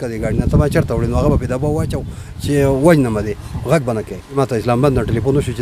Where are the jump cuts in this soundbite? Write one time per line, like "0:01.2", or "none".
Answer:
0:04.4